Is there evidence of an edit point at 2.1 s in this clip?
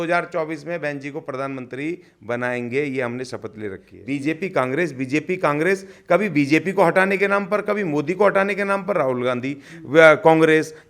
no; 1 cut; at 3.9 s

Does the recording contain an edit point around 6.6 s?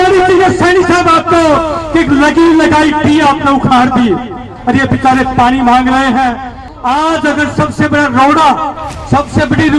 yes; 1 cut; at 6.6 s

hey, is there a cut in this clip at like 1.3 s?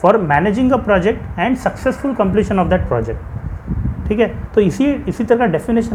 no; 0 cuts

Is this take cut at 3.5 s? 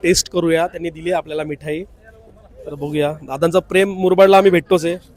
no; 0 cuts

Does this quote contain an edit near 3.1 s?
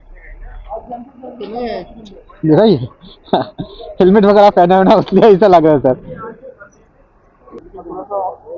no; 1 cut; at 7.5 s

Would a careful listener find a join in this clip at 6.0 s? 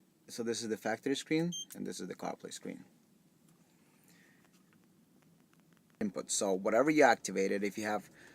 yes; 1 cut; at 6.0 s

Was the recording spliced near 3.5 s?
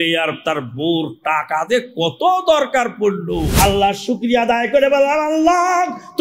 yes; 1 cut; at 3.5 s

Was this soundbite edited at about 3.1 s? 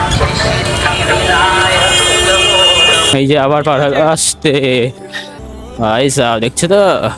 yes; 1 cut; at 3.1 s

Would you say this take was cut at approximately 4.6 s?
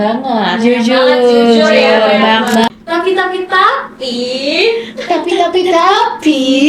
no; 1 cut; at 2.7 s

